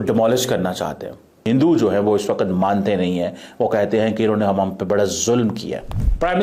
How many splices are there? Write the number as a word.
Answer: one